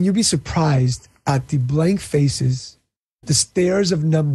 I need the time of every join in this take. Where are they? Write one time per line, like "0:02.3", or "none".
0:03.1